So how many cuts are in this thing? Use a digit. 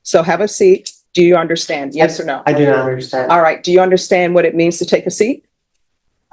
1